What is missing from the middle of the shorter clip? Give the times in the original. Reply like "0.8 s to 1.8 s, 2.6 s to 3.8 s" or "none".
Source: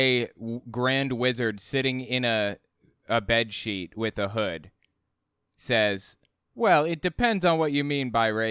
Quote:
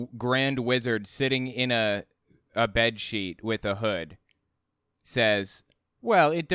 none

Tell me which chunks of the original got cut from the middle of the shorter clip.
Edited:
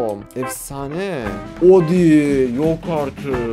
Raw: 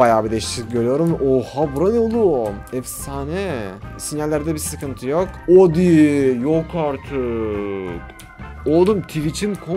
3.9 s to 5.4 s

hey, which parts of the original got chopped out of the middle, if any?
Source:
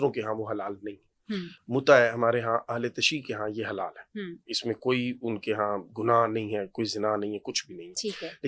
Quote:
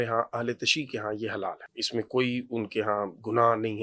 4.0 s to 4.4 s

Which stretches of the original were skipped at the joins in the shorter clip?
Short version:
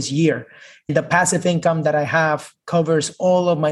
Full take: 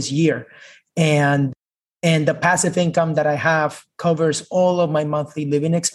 0.9 s to 2.2 s

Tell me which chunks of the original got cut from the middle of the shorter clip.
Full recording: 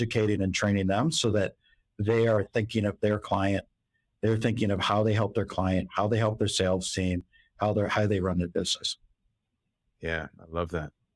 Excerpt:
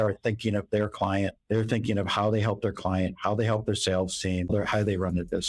3.7 s to 4.1 s, 7.2 s to 7.7 s

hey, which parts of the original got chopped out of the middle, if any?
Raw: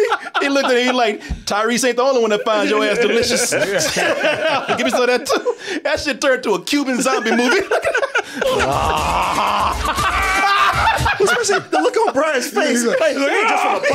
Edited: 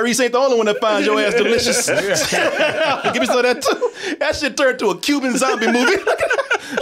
none

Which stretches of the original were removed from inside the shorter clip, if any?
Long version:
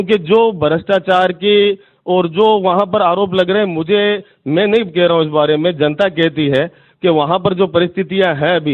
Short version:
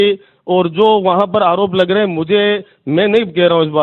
none

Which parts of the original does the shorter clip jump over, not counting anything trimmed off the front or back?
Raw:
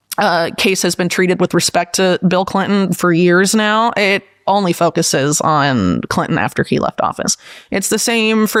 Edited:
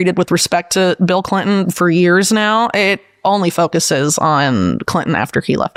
none

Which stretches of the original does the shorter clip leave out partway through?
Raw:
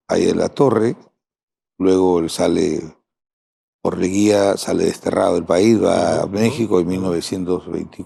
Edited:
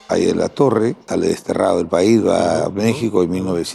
1.1 s to 4.6 s

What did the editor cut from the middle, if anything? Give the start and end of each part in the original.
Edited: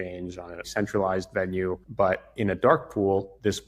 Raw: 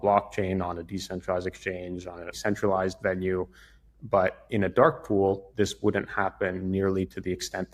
3.5 s to 4.0 s

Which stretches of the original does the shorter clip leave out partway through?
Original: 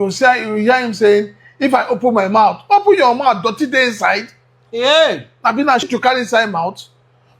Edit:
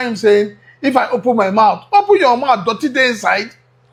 none

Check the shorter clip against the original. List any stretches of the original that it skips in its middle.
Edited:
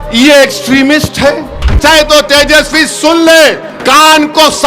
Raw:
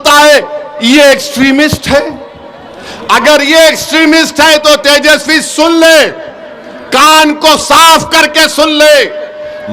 2.4 s to 4.3 s, 6.2 s to 6.8 s

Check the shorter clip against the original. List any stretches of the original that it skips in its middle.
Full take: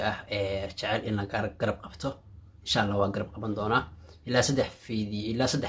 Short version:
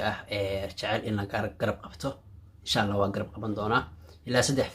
none

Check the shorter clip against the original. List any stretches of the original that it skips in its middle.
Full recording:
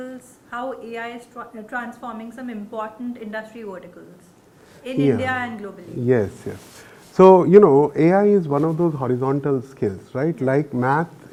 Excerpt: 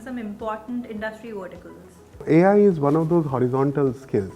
4.6 s to 7.9 s

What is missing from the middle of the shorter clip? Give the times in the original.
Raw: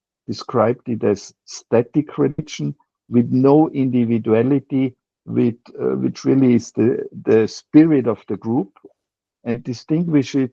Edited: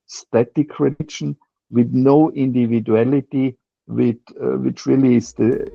none

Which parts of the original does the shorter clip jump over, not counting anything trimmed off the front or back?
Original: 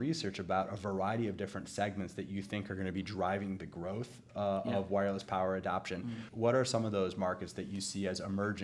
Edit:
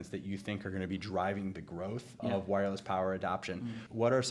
4.3 s to 4.6 s

